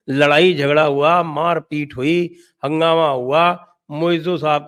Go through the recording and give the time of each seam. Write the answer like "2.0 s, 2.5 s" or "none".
none